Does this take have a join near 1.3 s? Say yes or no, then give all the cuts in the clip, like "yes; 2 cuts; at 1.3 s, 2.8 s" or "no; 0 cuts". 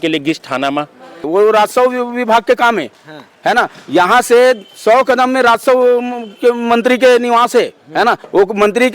yes; 1 cut; at 1.3 s